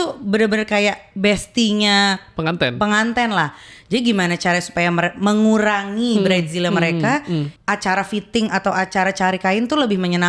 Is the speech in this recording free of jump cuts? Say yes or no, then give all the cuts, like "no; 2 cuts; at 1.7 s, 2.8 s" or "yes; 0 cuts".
no; 1 cut; at 7.5 s